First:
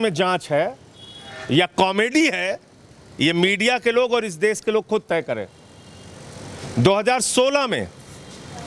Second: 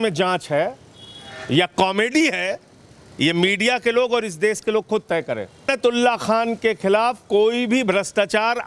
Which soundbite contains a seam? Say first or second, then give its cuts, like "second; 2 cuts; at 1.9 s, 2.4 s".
second; 1 cut; at 5.7 s